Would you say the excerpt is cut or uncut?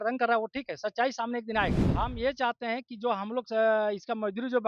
cut